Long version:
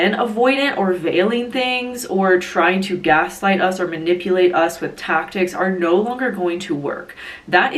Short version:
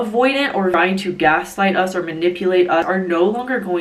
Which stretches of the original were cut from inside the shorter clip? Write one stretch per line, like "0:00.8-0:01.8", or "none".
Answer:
0:01.0-0:02.6
0:04.7-0:05.6